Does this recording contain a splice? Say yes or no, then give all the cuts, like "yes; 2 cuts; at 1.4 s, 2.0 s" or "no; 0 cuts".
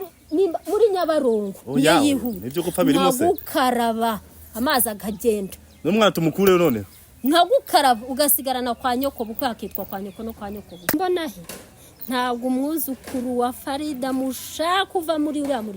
yes; 1 cut; at 10.9 s